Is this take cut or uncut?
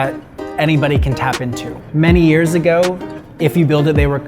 cut